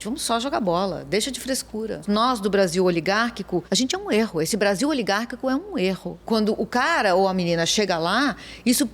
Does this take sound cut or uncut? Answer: cut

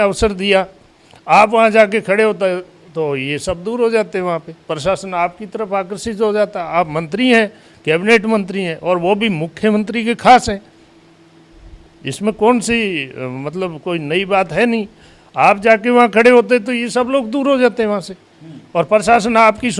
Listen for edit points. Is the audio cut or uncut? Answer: uncut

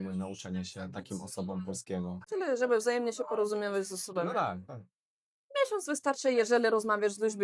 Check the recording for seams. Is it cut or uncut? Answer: cut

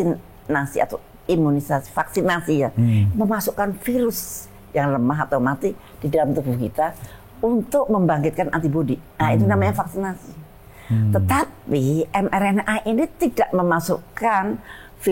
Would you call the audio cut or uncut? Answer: uncut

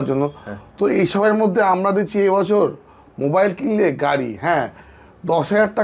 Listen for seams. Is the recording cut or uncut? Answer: uncut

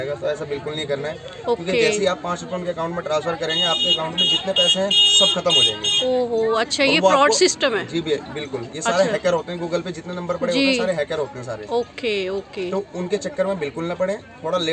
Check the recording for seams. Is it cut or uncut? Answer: uncut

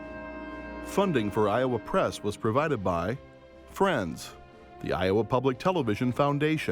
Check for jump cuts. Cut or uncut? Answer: cut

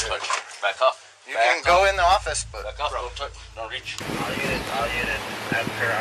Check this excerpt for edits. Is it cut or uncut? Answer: cut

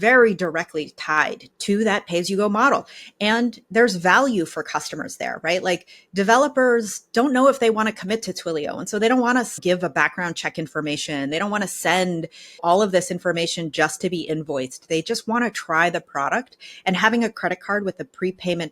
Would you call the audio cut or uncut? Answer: cut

